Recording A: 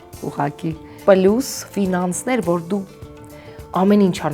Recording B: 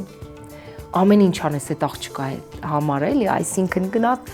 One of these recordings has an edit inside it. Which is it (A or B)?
A